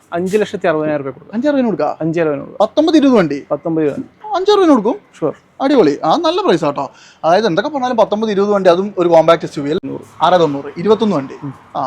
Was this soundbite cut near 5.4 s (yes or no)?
no